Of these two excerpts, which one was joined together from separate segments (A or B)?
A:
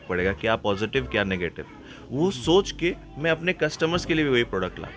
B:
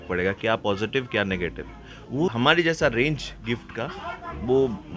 B